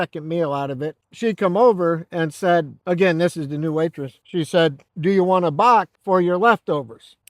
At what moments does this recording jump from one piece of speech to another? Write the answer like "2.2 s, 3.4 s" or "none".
none